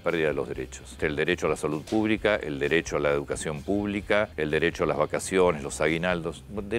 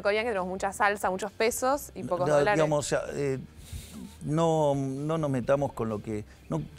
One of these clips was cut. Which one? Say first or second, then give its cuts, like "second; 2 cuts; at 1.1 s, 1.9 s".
first; 2 cuts; at 1.0 s, 4.3 s